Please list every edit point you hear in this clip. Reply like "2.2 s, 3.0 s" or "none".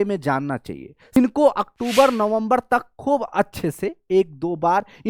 1.2 s